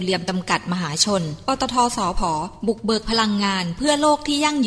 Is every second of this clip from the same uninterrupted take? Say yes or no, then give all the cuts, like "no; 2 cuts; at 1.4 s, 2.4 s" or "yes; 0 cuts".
yes; 0 cuts